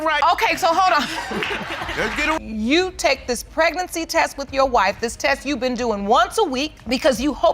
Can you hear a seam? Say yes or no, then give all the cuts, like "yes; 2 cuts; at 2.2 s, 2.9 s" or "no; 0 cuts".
yes; 1 cut; at 2.4 s